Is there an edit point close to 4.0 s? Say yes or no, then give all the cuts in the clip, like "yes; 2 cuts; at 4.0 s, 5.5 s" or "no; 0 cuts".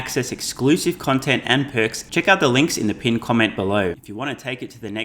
yes; 2 cuts; at 2.0 s, 4.0 s